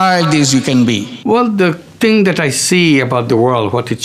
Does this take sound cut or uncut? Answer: cut